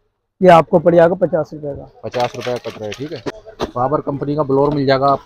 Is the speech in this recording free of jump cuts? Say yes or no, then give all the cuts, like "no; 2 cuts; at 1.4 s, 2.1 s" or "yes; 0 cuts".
no; 1 cut; at 3.5 s